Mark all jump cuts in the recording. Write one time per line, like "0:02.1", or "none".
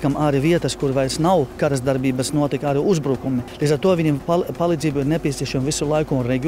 0:03.5